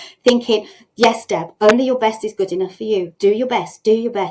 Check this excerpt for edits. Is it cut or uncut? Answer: cut